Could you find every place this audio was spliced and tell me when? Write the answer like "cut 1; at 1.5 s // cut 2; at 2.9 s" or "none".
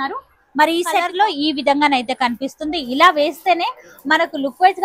cut 1; at 1.1 s